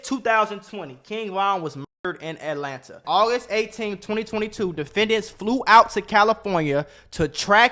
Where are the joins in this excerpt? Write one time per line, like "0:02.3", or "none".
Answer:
0:03.0